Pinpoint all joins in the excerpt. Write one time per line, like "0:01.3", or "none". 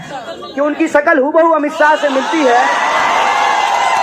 none